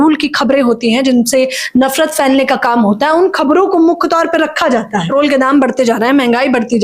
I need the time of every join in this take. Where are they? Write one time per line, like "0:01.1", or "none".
0:05.1